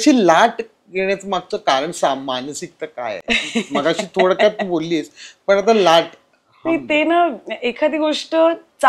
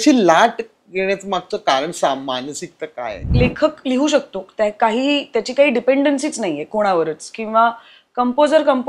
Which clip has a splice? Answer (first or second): second